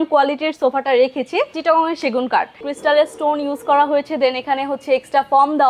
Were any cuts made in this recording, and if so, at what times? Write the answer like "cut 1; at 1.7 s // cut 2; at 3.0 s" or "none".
cut 1; at 1.6 s // cut 2; at 2.6 s

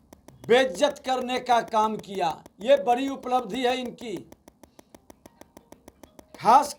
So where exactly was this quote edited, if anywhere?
none

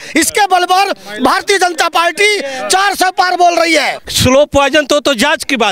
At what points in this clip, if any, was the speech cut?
cut 1; at 4.0 s

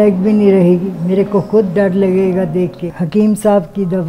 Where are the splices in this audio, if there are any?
cut 1; at 2.9 s

